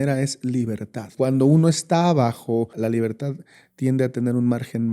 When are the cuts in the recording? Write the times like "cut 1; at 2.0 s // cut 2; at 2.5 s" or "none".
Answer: cut 1; at 1.1 s // cut 2; at 2.7 s